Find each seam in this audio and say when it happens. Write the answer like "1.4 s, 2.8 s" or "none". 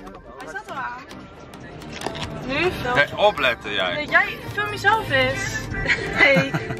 2.8 s, 5.8 s